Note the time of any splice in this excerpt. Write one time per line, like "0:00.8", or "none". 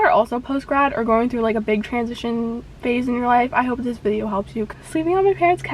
0:04.7